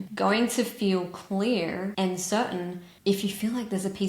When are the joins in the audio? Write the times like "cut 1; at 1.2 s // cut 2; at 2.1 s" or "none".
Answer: none

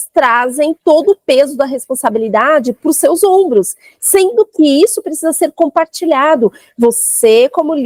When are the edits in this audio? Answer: none

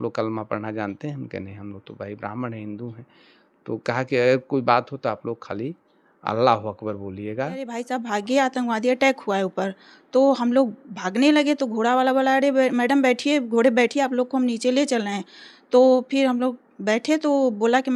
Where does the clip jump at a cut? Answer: cut 1; at 7.8 s

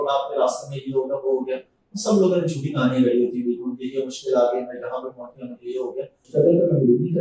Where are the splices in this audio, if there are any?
cut 1; at 6.2 s

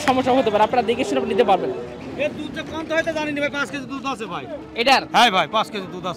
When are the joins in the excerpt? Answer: cut 1; at 1.9 s

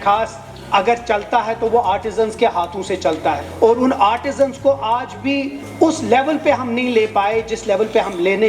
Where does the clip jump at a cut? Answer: cut 1; at 3.5 s // cut 2; at 5.6 s

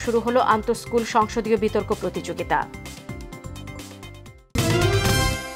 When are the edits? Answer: cut 1; at 4.5 s

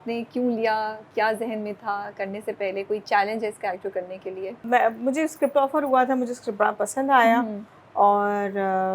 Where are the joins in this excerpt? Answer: none

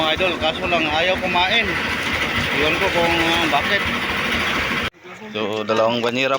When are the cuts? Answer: cut 1; at 4.9 s

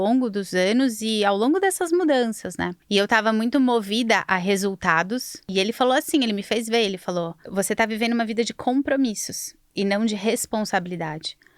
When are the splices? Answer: cut 1; at 2.7 s // cut 2; at 5.4 s // cut 3; at 7.4 s

